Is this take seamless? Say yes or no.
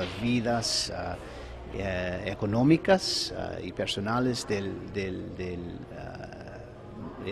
no